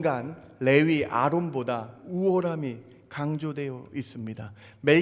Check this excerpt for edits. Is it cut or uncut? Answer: uncut